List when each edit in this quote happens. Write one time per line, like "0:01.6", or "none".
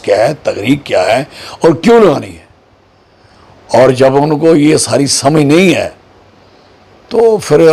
none